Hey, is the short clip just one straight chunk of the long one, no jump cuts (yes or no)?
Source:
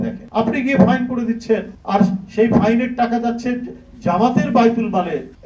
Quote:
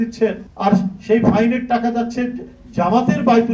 yes